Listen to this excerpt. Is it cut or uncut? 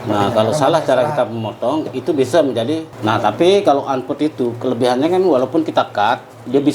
cut